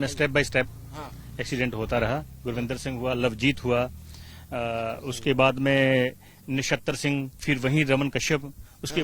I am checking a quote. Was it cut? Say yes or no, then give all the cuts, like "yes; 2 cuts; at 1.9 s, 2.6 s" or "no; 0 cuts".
no; 0 cuts